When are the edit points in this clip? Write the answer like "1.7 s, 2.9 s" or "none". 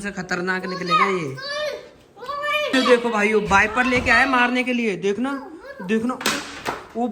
2.7 s